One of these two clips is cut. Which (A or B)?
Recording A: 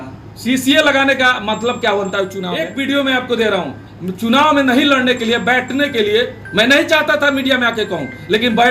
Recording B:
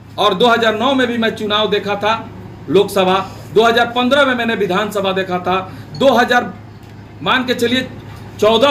A